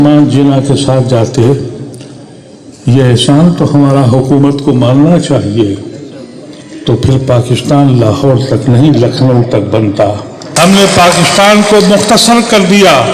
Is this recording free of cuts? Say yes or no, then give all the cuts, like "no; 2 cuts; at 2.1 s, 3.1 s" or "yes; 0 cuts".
no; 1 cut; at 10.3 s